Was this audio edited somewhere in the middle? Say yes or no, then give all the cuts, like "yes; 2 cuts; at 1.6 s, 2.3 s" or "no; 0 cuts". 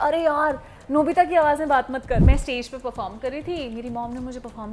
yes; 1 cut; at 2.2 s